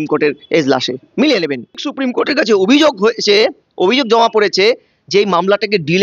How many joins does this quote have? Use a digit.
1